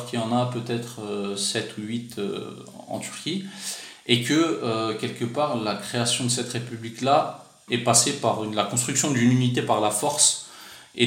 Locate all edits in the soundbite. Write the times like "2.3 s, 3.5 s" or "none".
7.6 s